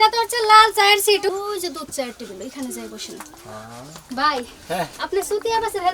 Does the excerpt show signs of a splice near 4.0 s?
yes; 1 cut; at 4.0 s

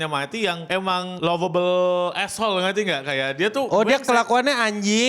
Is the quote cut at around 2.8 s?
no; 1 cut; at 1.1 s

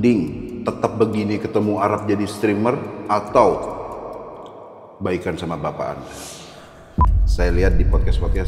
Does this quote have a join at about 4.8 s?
no; 1 cut; at 6.8 s

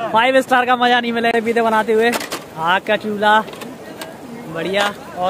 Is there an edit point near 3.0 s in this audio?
no; 1 cut; at 1.3 s

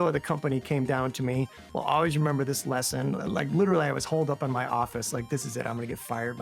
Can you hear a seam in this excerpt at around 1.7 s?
no; 0 cuts

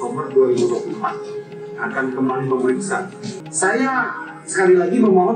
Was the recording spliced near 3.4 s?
yes; 1 cut; at 3.4 s

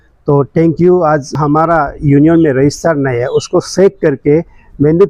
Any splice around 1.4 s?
yes; 1 cut; at 1.4 s

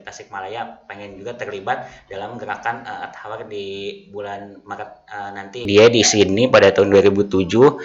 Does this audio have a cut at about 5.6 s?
yes; 1 cut; at 5.6 s

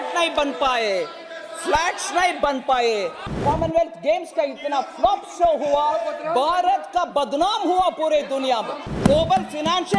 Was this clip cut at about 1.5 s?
no; 2 cuts; at 3.4 s, 8.9 s

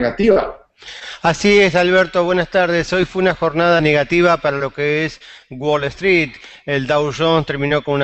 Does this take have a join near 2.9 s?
yes; 1 cut; at 2.9 s

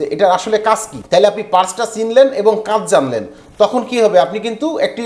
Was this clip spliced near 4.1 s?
no; 1 cut; at 0.9 s

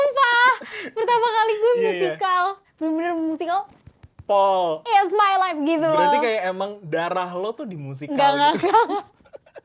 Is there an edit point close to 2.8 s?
no; 0 cuts

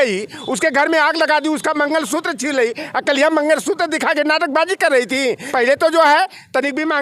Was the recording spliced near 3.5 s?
no; 1 cut; at 5.4 s

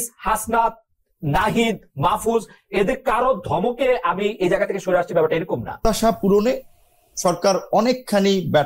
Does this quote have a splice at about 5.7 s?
yes; 1 cut; at 5.7 s

